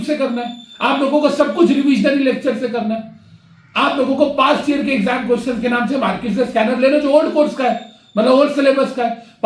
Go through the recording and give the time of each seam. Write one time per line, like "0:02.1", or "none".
none